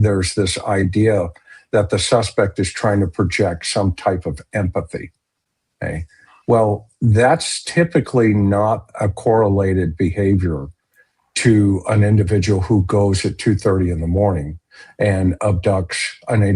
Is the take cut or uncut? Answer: uncut